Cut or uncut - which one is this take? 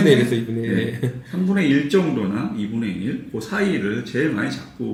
uncut